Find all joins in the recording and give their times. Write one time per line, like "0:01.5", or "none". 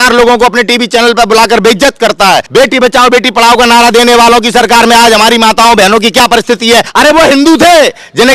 0:02.5
0:06.9